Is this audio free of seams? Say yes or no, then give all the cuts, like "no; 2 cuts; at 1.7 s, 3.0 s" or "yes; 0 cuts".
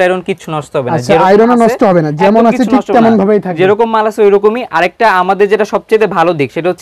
yes; 0 cuts